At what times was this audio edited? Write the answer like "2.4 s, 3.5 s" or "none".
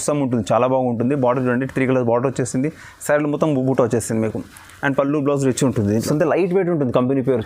6.1 s